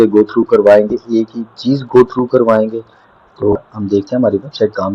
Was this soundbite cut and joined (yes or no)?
yes